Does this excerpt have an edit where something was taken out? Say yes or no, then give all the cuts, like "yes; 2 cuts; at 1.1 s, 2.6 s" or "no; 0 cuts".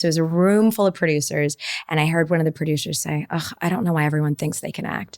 no; 0 cuts